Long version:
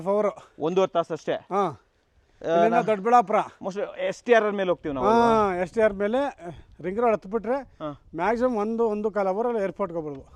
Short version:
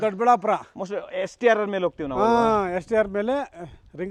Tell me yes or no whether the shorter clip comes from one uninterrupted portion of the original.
yes